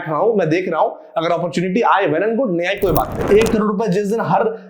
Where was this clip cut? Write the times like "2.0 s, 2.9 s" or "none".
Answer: 3.2 s